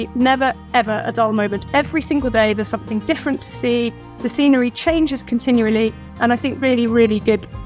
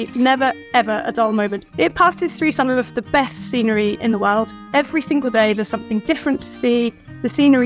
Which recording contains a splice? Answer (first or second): second